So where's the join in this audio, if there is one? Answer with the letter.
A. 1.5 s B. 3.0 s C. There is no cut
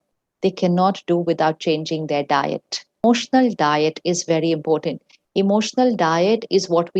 B